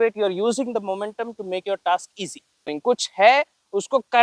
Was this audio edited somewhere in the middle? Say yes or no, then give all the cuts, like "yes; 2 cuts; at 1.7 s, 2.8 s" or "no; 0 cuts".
yes; 1 cut; at 2.7 s